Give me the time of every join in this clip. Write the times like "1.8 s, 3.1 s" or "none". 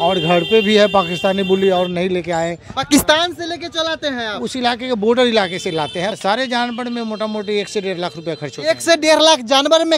6.2 s